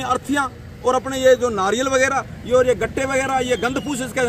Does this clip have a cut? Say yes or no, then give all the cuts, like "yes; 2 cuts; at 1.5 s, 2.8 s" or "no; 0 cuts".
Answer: no; 0 cuts